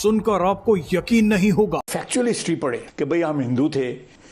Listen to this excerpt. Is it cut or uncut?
cut